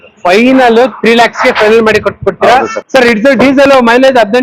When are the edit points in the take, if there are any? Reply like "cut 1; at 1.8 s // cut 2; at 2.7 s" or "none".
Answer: cut 1; at 2.7 s